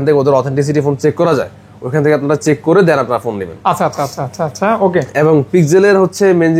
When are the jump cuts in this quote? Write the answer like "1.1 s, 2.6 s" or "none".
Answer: none